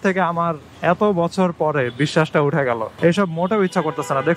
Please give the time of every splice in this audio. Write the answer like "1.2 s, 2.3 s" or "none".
2.9 s